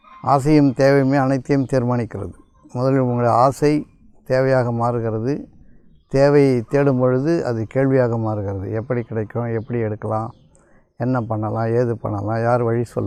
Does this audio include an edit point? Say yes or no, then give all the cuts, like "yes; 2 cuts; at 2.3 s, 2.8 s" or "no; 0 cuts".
no; 0 cuts